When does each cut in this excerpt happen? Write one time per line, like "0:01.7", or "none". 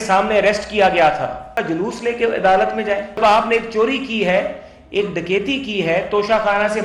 0:01.6
0:03.2

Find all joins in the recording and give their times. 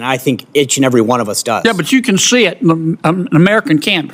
none

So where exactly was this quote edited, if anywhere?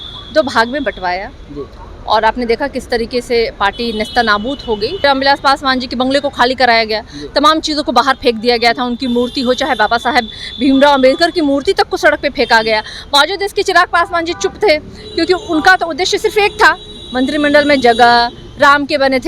0:05.0

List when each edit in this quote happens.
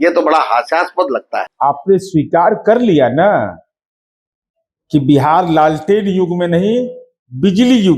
0:01.4

